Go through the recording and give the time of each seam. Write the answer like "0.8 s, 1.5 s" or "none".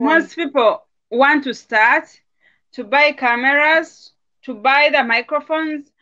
0.9 s